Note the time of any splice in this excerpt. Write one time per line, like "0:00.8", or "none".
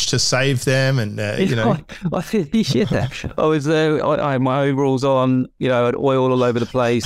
none